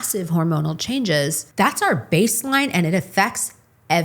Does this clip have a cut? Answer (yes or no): yes